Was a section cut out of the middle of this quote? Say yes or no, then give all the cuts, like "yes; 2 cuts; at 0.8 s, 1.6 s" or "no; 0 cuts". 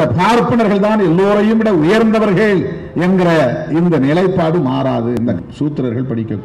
yes; 1 cut; at 5.2 s